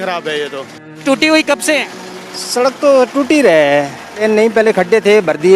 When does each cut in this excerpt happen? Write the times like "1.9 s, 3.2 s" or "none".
1.0 s, 4.0 s

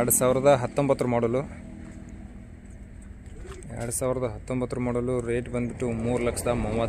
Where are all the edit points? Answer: none

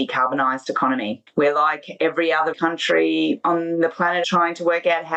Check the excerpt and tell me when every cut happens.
1.2 s, 2.5 s, 3.4 s, 4.3 s

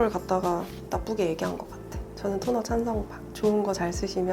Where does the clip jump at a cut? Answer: 1.8 s

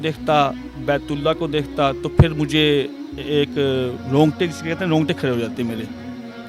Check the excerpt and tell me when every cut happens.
4.0 s

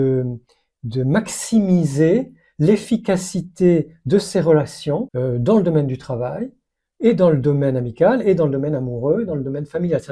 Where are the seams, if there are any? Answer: 5.1 s

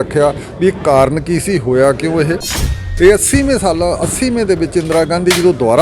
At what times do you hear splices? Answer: 2.8 s

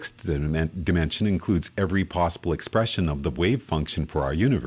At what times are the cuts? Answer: 1.9 s

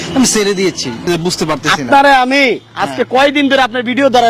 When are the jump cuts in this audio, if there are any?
1.1 s

